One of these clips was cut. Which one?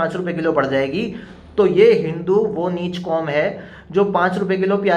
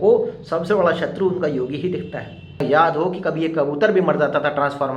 second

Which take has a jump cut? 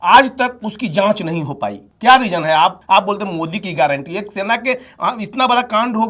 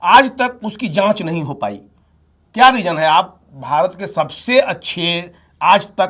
first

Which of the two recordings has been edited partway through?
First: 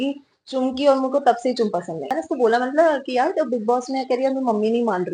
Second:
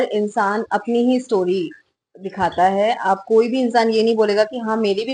first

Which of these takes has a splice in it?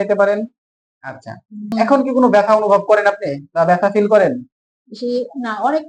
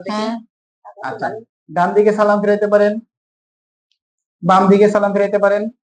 first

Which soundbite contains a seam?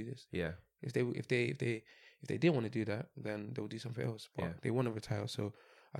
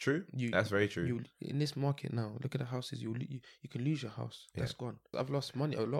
second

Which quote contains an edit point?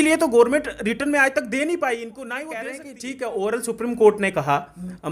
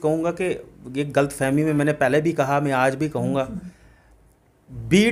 first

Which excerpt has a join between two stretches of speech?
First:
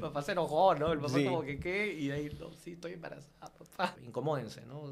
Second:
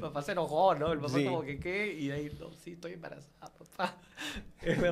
first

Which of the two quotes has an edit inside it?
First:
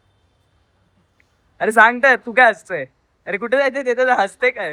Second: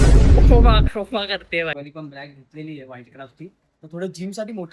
second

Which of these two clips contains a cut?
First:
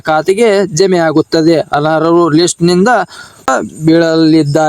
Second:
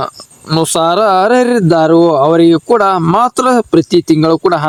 first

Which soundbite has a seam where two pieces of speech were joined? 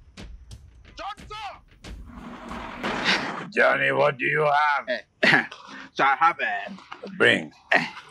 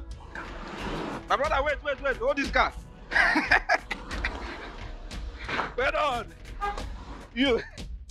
first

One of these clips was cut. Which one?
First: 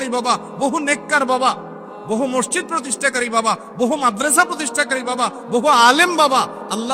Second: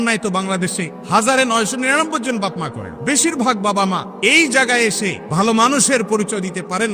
second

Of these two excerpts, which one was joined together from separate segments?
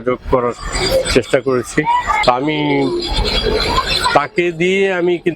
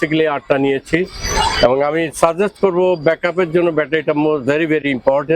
first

